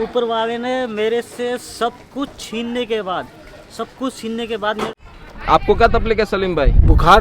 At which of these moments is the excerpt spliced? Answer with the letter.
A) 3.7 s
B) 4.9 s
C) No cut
B